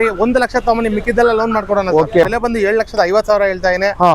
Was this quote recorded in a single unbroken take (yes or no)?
no